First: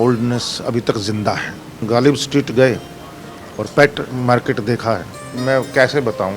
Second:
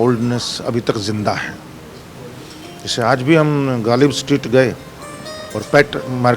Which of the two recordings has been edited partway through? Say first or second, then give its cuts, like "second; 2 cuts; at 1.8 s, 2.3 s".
first; 2 cuts; at 1.8 s, 5.4 s